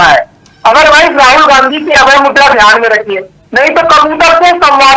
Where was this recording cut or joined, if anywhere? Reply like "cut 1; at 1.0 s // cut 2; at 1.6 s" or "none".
none